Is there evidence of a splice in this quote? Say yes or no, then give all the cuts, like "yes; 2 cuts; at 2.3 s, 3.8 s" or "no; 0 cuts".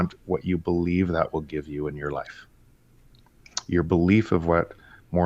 no; 0 cuts